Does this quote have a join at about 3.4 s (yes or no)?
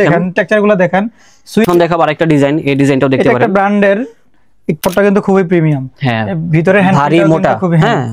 no